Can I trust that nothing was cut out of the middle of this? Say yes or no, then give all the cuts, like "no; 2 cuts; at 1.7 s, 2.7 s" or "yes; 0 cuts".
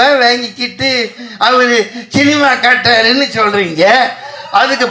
yes; 0 cuts